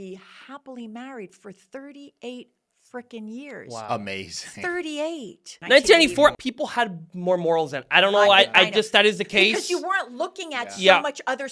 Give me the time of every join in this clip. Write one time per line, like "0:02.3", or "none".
0:05.5
0:06.4